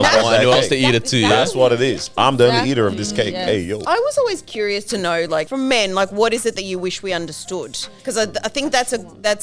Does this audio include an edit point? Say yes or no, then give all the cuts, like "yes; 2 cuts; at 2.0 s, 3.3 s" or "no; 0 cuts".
yes; 3 cuts; at 3.8 s, 5.5 s, 7.8 s